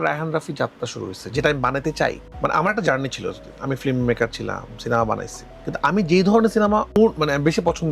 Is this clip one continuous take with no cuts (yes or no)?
yes